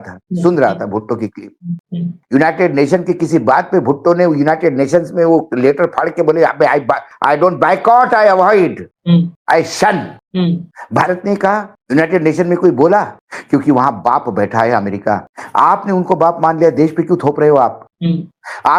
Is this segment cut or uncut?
uncut